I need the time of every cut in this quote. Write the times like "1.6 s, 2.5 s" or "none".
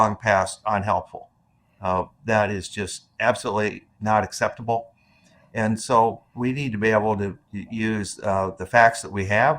none